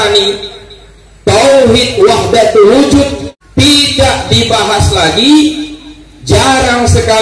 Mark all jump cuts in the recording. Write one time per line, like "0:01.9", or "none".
0:03.3